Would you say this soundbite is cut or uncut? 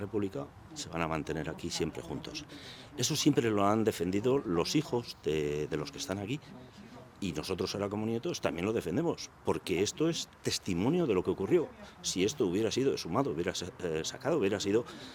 uncut